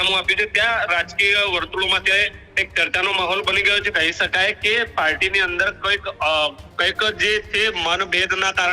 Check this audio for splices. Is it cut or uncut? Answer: cut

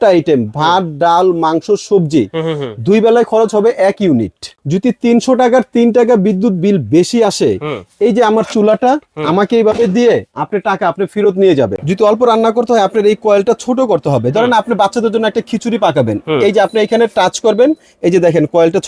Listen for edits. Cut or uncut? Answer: cut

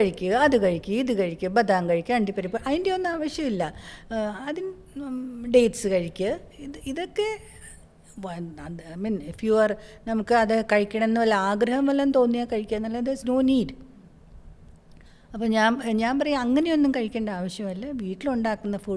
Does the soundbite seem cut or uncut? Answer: uncut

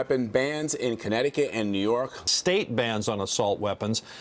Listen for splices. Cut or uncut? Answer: cut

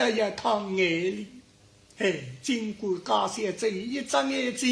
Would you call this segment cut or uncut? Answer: cut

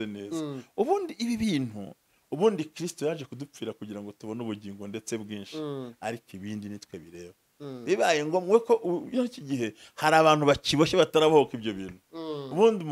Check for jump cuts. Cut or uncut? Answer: uncut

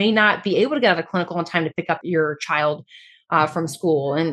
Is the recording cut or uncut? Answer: cut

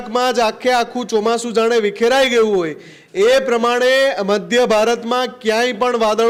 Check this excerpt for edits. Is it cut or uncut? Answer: uncut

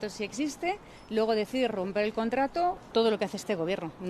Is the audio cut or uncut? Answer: cut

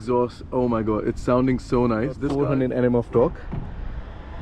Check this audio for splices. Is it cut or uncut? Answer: cut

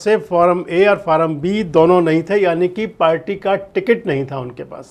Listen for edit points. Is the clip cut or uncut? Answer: uncut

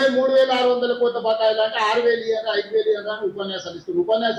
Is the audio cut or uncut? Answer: uncut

